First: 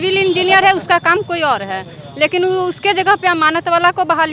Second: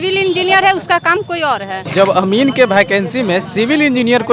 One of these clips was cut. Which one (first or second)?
second